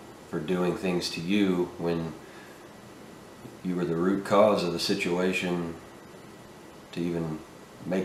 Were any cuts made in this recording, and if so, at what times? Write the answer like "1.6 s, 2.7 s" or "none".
none